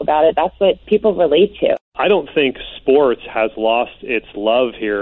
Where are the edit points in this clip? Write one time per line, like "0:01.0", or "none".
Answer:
0:00.8
0:01.8